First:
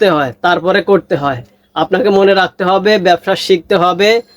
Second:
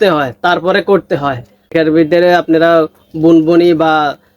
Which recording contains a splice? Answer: second; 1 cut; at 1.7 s

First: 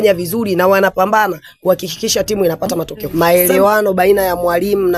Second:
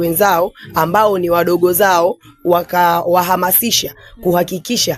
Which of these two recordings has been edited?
first; 1 cut; at 3.0 s

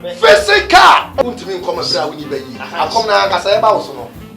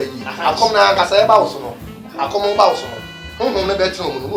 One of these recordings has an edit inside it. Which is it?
first; 1 cut; at 1.2 s

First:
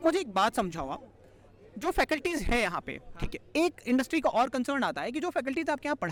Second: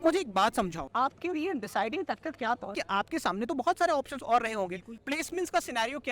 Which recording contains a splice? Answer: second; 2 cuts; at 0.8 s, 5.0 s

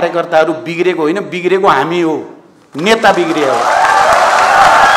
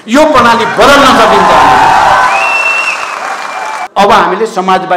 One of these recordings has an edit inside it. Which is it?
second; 1 cut; at 3.8 s

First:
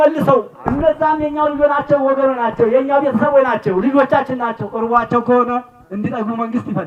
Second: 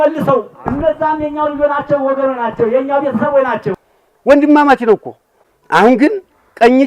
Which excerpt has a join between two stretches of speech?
second; 1 cut; at 3.7 s

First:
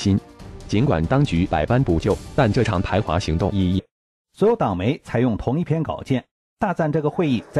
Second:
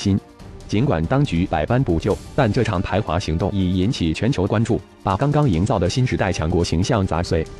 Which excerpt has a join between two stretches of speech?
second; 1 cut; at 3.8 s

